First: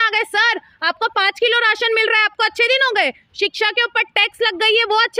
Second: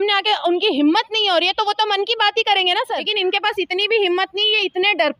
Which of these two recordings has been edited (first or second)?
second